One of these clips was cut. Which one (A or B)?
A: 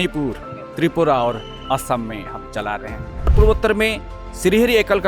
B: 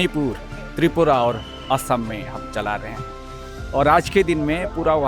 A